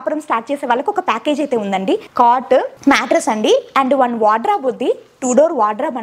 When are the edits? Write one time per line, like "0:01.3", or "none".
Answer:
0:02.1
0:02.7